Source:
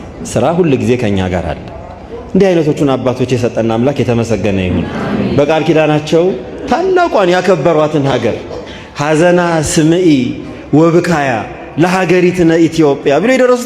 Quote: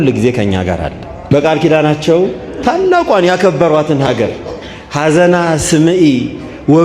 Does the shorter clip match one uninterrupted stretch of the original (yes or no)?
no